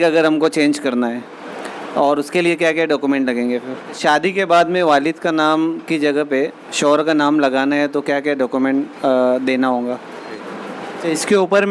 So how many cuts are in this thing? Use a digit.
2